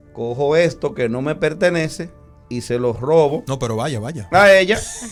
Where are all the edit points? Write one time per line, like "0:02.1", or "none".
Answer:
none